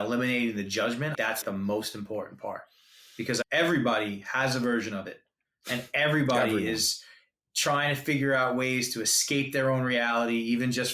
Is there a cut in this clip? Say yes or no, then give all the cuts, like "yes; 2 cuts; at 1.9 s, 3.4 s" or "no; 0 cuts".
yes; 3 cuts; at 1.4 s, 3.4 s, 7.4 s